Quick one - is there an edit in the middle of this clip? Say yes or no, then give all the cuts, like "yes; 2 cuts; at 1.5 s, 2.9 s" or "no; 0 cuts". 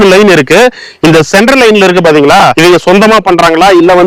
yes; 1 cut; at 2.5 s